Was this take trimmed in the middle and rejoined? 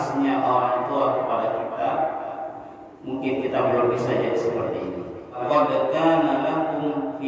yes; 1 cut; at 5.4 s

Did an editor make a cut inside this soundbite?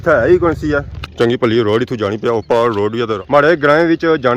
yes; 2 cuts; at 0.9 s, 3.2 s

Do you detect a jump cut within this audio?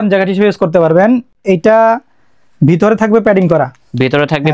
no; 0 cuts

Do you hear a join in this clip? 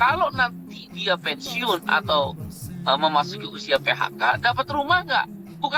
no; 0 cuts

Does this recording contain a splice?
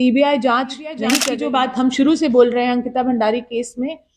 yes; 1 cut; at 1.3 s

